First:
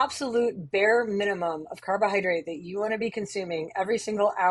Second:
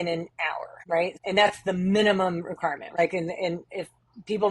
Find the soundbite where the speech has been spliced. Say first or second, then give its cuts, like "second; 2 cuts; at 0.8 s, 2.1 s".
second; 2 cuts; at 1.1 s, 3.0 s